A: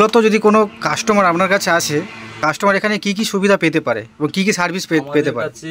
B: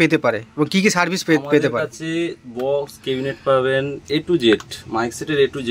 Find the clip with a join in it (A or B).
A